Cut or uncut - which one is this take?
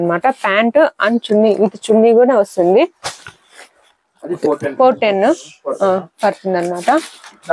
uncut